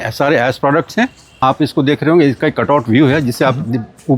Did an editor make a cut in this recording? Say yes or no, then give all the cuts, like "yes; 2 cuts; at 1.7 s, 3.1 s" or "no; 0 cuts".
yes; 1 cut; at 1.4 s